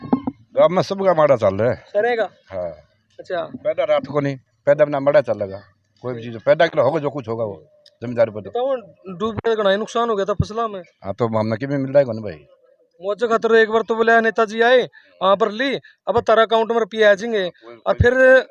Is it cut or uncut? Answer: uncut